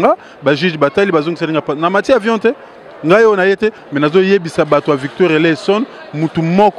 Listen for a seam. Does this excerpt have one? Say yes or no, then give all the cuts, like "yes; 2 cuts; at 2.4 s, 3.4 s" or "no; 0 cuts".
yes; 1 cut; at 3.8 s